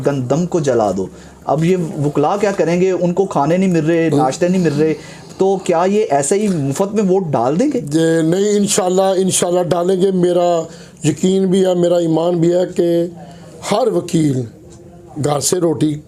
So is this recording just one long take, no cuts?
yes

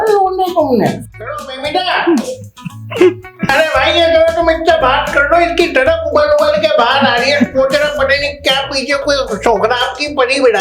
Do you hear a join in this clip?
yes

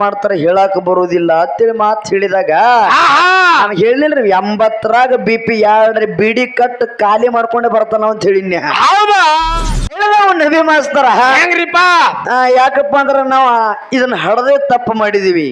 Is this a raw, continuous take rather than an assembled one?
no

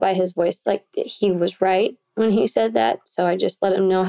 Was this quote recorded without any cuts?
yes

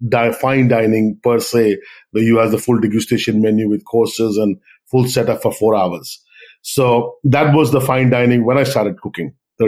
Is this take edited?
no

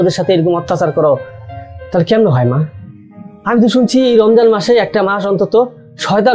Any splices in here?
no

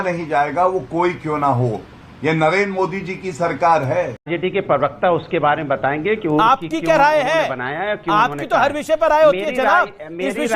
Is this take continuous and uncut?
no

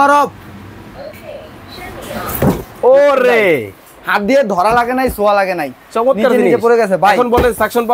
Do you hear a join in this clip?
no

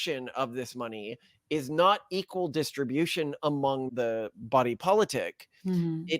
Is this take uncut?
no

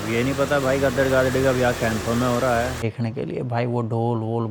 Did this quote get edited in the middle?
yes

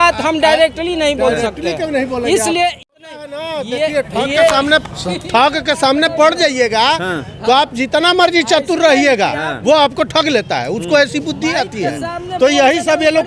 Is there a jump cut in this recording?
yes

